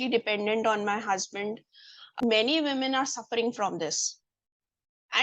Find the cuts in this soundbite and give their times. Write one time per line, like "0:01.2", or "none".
0:02.2